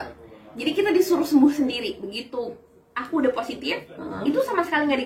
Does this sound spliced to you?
no; 0 cuts

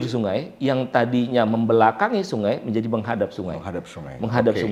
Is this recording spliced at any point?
no; 0 cuts

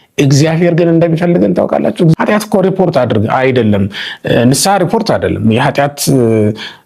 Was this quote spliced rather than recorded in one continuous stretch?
yes; 1 cut; at 2.1 s

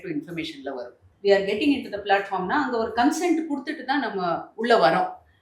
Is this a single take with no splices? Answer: no; 1 cut; at 1.0 s

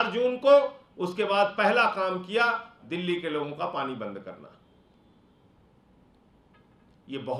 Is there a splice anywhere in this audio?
no; 0 cuts

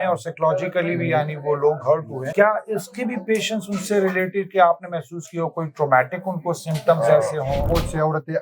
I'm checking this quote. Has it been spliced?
yes; 2 cuts; at 2.2 s, 7.7 s

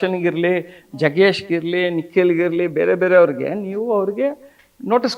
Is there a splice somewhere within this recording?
no; 0 cuts

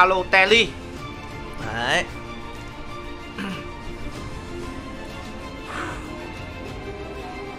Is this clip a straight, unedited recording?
no; 1 cut; at 1.0 s

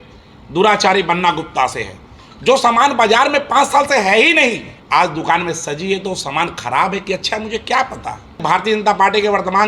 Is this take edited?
yes; 2 cuts; at 4.7 s, 8.4 s

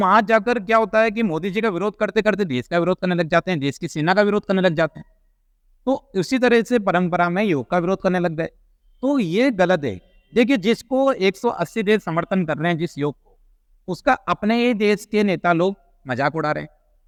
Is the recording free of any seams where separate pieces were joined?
yes; 0 cuts

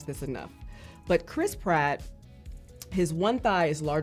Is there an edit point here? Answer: no; 0 cuts

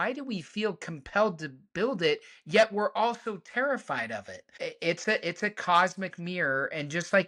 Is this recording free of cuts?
no; 1 cut; at 4.5 s

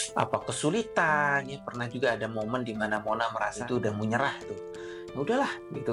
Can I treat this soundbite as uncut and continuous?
no; 1 cut; at 3.7 s

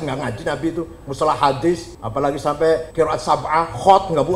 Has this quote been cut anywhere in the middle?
yes; 2 cuts; at 2.0 s, 2.9 s

